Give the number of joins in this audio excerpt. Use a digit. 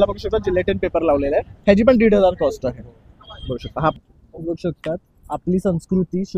1